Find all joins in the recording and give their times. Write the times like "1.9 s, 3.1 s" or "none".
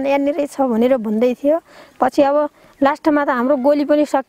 none